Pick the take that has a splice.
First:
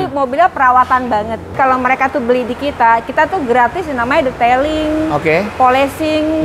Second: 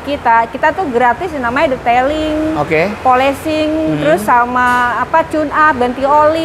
first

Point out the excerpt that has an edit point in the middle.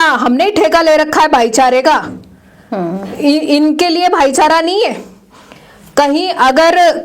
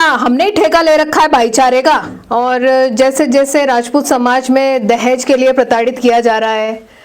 second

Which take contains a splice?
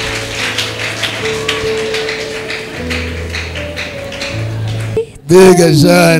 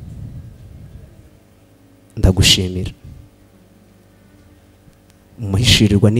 first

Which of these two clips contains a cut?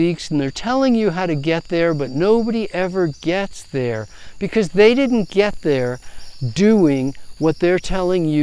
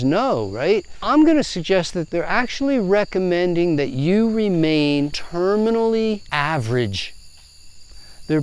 second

